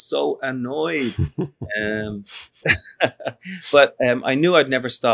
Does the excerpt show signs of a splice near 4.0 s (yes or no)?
no